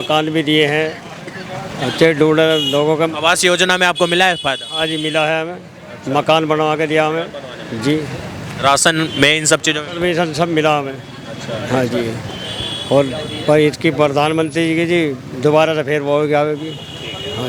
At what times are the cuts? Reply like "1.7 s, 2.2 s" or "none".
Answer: none